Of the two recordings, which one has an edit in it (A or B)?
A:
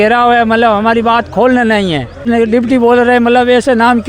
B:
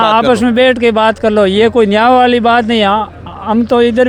A